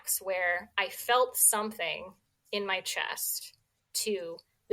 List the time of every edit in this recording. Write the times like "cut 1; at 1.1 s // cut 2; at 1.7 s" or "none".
none